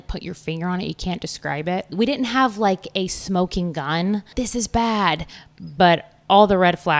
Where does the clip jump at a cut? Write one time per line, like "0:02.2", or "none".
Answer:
0:01.9
0:04.3